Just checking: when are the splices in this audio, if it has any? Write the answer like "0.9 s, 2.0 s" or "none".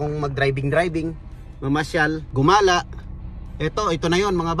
2.3 s